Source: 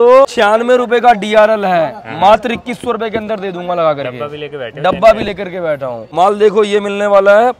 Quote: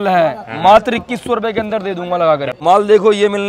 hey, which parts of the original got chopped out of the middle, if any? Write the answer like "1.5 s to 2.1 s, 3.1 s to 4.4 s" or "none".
4.1 s to 6.0 s